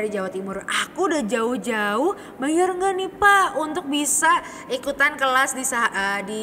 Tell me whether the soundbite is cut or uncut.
uncut